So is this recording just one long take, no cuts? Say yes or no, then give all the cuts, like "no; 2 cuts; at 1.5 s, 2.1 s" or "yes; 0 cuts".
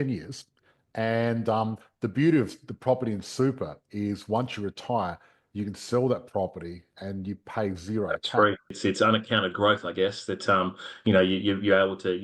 no; 1 cut; at 8.7 s